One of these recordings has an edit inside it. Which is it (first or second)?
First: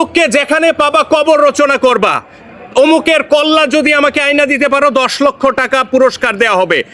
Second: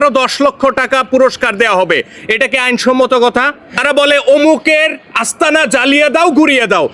second